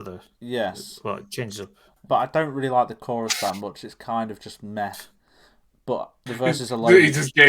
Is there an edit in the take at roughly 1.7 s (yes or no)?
no